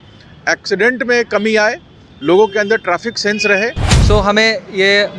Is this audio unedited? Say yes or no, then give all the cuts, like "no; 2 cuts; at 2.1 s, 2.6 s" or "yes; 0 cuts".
no; 1 cut; at 3.9 s